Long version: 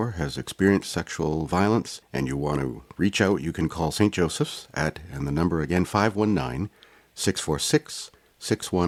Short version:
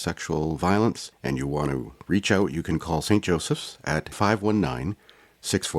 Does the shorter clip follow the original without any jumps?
no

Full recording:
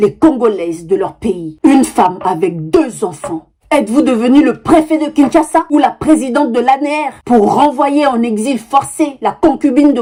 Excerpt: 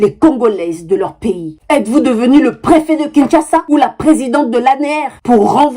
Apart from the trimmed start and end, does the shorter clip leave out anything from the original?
yes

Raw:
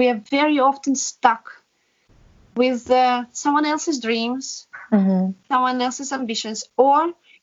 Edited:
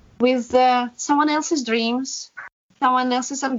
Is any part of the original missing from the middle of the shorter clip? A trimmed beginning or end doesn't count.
yes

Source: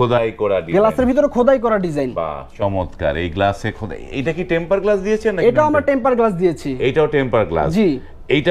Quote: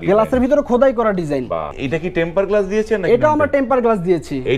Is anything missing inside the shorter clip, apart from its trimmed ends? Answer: yes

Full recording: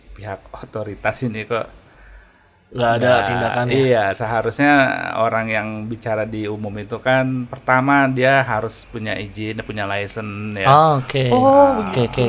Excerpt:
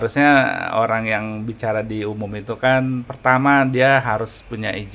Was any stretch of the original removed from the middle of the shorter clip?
no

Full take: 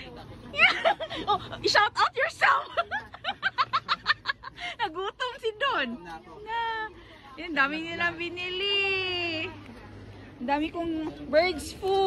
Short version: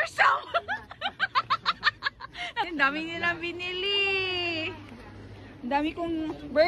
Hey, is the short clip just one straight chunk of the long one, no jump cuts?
no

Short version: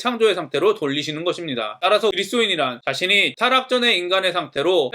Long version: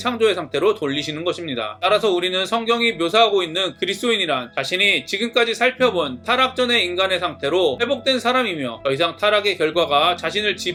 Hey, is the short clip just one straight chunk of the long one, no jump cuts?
no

